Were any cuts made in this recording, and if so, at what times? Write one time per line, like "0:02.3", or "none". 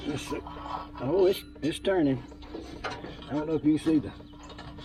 none